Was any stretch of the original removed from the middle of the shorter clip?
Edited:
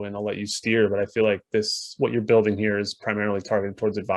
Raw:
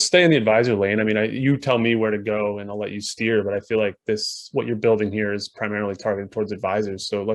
no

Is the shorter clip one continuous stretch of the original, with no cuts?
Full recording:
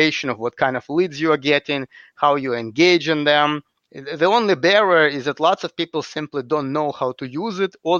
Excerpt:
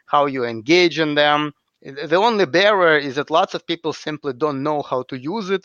yes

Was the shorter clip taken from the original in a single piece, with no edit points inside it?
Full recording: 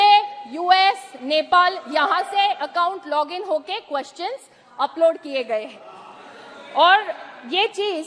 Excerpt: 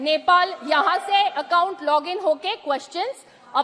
yes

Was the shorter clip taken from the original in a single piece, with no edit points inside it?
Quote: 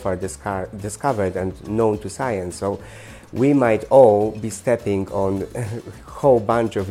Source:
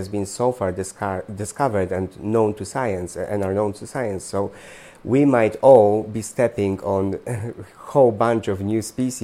no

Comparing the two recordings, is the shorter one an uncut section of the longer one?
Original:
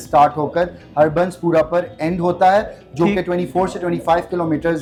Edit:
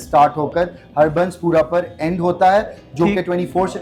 yes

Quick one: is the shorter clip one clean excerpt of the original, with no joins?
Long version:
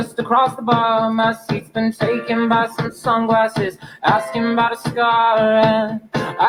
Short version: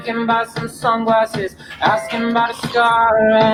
yes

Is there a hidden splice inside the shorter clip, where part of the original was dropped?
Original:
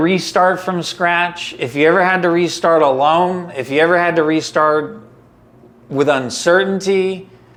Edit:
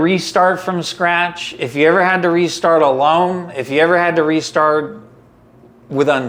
no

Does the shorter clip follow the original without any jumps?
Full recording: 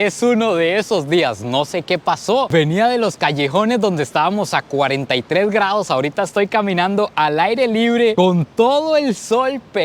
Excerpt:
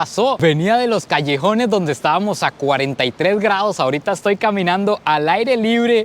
yes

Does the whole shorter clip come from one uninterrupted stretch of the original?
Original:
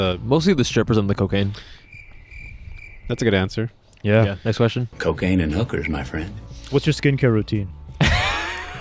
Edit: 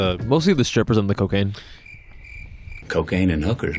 no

